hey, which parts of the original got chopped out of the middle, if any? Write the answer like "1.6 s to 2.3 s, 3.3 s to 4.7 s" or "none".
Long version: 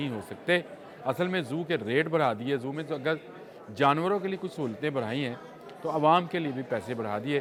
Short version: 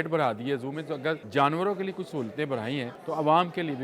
3.2 s to 3.7 s, 5.4 s to 5.7 s